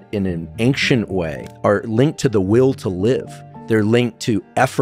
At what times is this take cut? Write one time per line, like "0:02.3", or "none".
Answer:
0:01.4